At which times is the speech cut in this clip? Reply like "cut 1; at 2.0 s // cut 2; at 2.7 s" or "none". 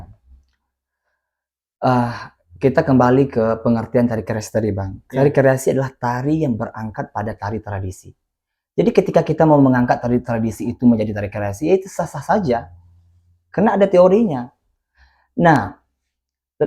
none